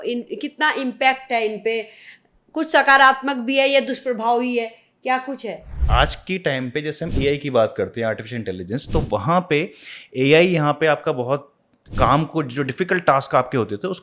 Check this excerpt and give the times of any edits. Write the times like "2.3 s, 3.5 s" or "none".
5.7 s